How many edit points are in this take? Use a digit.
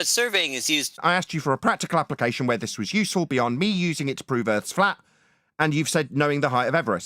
1